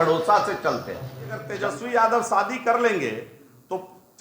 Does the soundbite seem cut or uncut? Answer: cut